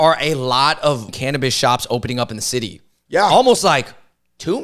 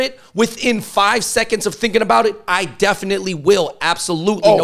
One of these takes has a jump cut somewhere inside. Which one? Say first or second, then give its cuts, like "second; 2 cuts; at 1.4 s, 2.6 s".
first; 1 cut; at 1.1 s